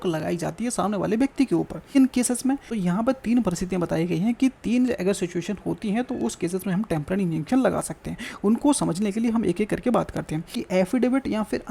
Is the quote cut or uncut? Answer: cut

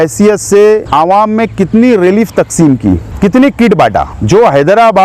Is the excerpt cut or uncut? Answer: cut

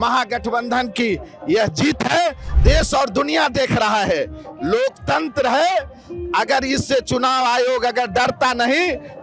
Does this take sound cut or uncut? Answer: cut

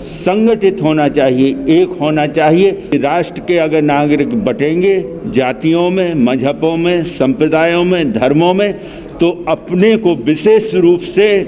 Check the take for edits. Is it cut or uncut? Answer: cut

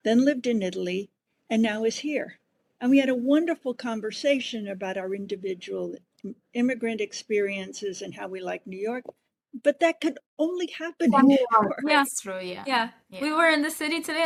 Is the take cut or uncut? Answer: uncut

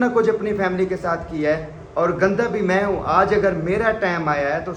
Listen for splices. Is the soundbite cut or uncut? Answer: uncut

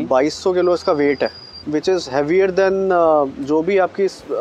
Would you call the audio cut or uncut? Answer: cut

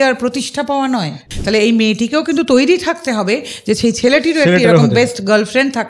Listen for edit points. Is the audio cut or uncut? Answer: cut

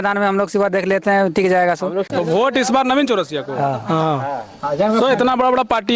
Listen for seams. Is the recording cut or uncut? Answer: cut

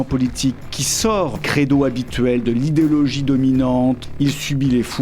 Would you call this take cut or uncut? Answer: cut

